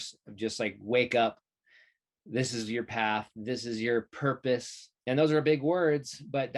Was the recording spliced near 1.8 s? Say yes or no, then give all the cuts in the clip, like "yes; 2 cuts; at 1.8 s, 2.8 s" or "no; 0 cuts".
no; 1 cut; at 4.9 s